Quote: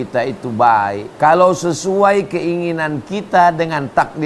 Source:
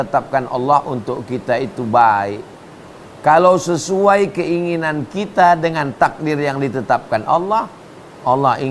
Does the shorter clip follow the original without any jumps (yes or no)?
no